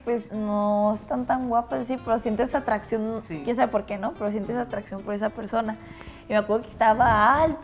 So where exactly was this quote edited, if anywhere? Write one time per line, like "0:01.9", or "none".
none